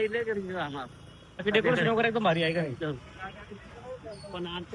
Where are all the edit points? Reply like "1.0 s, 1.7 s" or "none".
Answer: 1.4 s

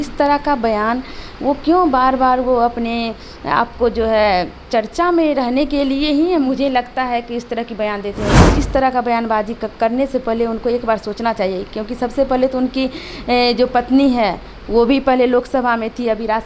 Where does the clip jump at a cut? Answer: 8.4 s

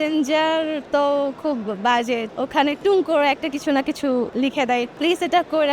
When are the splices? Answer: 2.3 s, 4.4 s

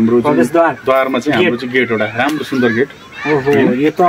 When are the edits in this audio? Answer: none

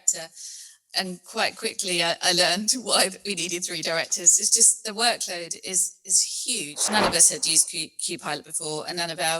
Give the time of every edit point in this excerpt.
6.8 s

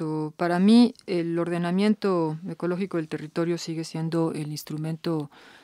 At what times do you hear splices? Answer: 3.8 s

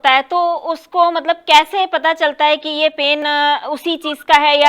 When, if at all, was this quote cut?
3.2 s

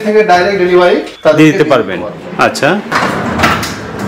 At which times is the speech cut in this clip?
2.9 s

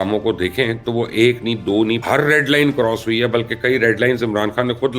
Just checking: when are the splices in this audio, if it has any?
2.0 s

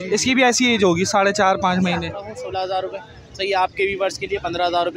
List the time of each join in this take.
2.4 s

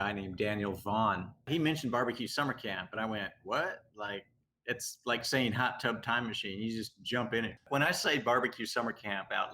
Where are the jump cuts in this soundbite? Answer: 1.4 s, 7.6 s

